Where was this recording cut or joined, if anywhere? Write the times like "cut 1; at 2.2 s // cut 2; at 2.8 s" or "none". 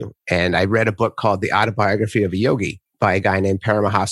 cut 1; at 2.8 s